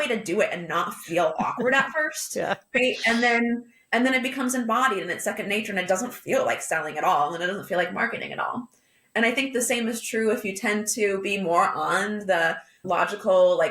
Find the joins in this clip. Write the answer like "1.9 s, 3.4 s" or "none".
12.7 s